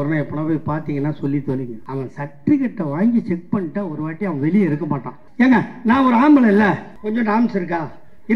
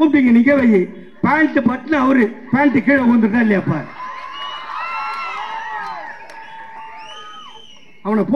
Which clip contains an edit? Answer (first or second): first